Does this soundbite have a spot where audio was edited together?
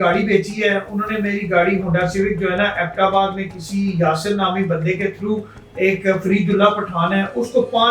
no; 0 cuts

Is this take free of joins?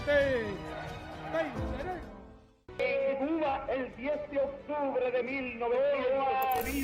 yes; 0 cuts

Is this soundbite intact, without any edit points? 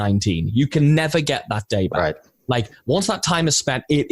yes; 0 cuts

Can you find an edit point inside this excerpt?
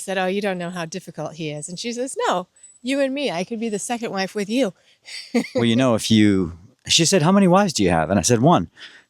yes; 1 cut; at 5.5 s

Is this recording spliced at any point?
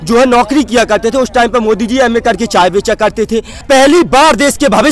yes; 1 cut; at 3.5 s

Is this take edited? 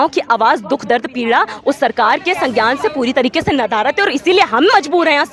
no; 0 cuts

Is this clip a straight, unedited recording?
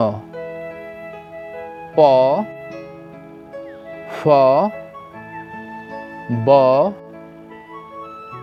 yes; 0 cuts

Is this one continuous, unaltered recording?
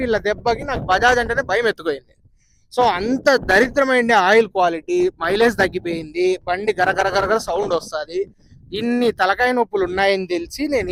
yes; 0 cuts

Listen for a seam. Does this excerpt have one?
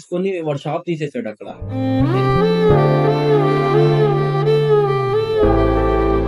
no; 0 cuts

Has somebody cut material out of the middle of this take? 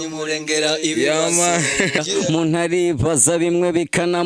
yes; 1 cut; at 2.0 s

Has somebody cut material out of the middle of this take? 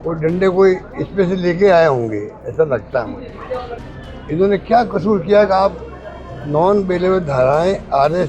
yes; 1 cut; at 3.9 s

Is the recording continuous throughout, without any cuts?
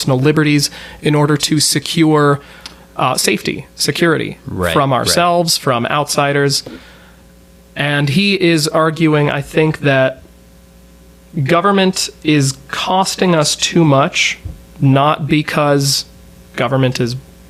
yes; 0 cuts

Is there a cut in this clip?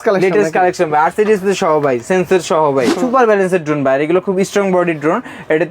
yes; 1 cut; at 2.9 s

